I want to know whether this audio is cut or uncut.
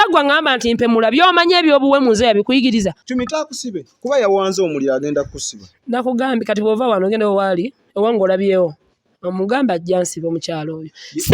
cut